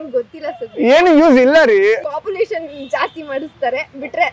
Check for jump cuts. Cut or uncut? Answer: cut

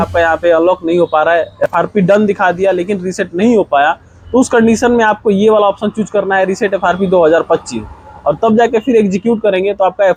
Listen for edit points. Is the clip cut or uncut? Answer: uncut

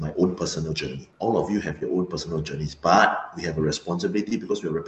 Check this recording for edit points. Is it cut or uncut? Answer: cut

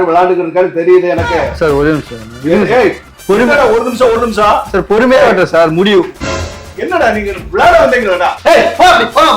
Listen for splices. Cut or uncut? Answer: cut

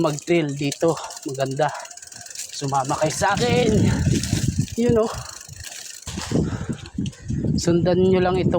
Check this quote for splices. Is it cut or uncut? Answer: cut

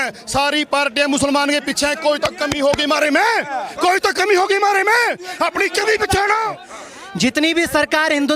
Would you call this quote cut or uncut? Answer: cut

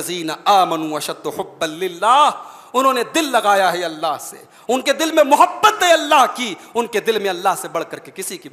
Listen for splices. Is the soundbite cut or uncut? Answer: uncut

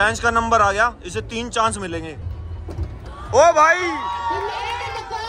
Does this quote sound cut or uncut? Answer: uncut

